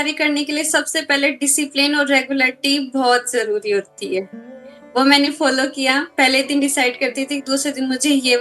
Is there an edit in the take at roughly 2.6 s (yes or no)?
no